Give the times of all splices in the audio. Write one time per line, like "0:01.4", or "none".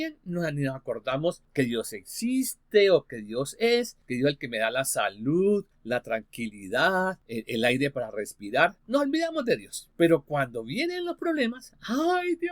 0:01.4
0:04.0
0:05.7
0:07.2
0:08.8
0:09.8

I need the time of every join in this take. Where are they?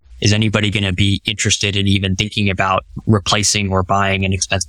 0:03.0

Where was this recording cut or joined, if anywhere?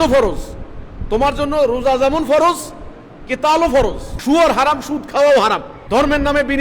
0:04.1
0:05.7

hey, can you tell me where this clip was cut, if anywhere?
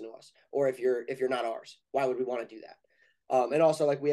none

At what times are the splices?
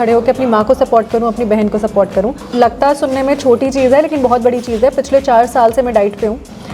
0:02.4

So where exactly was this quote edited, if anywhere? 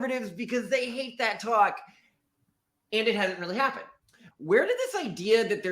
0:04.2

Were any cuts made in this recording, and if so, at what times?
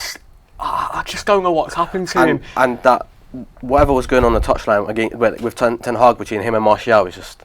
none

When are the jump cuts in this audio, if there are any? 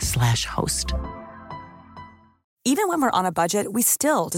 0:02.5

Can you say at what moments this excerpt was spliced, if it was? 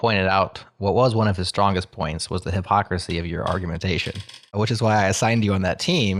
none

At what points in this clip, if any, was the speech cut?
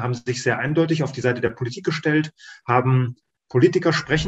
none

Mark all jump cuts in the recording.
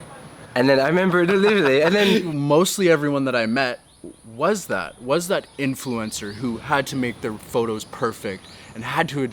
0:02.3

